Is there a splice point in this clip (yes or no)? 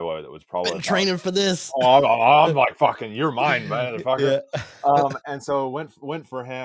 no